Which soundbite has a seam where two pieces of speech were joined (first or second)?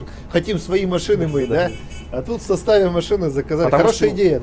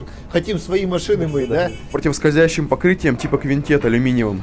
second